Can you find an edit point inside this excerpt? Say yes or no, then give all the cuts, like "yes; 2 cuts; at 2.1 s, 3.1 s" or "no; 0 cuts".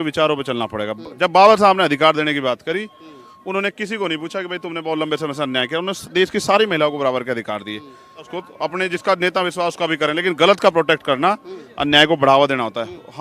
yes; 1 cut; at 8.4 s